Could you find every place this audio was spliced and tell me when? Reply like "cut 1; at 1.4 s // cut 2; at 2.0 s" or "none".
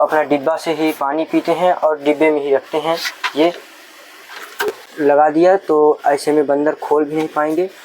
cut 1; at 4.8 s

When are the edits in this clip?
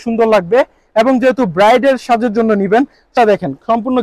cut 1; at 3.1 s

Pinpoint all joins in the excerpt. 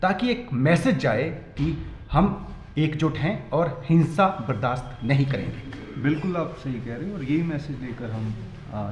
none

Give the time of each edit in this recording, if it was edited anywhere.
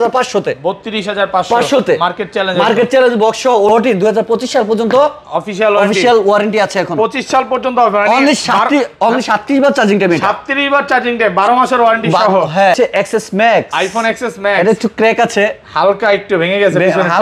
cut 1; at 3.7 s // cut 2; at 12.8 s

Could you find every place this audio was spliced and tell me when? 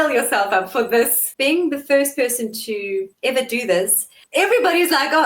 cut 1; at 1.2 s // cut 2; at 3.1 s // cut 3; at 4.1 s

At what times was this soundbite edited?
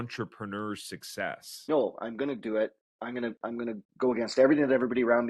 cut 1; at 1.7 s

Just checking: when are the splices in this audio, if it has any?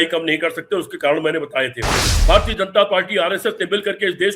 cut 1; at 2.1 s

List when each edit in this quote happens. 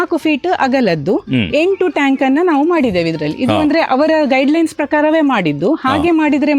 none

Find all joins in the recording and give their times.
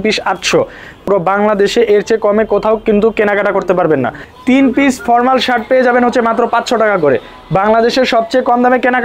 cut 1; at 1.0 s // cut 2; at 4.3 s

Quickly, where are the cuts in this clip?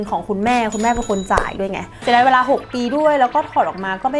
cut 1; at 2.0 s

